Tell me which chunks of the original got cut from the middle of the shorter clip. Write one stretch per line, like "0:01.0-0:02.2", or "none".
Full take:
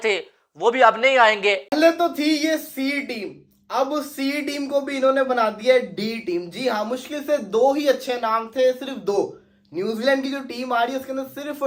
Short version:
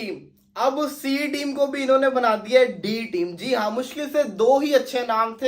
none